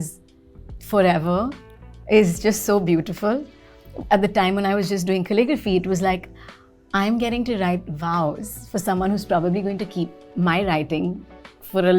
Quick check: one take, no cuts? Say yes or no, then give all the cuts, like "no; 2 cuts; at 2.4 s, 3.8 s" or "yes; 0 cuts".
yes; 0 cuts